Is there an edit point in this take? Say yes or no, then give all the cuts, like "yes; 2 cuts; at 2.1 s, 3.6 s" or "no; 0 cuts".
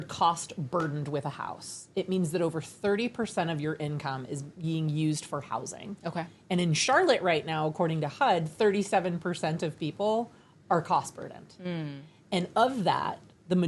no; 0 cuts